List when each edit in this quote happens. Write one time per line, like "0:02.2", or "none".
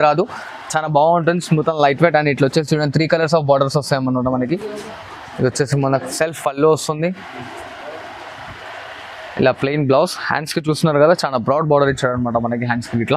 none